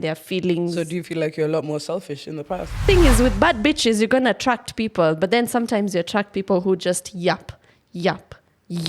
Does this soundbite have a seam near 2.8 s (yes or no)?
yes